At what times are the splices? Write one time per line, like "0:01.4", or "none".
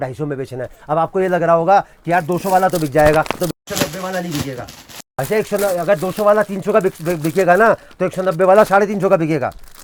none